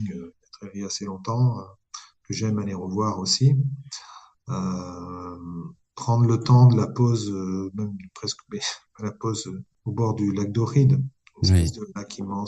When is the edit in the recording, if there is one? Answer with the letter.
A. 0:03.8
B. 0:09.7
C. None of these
B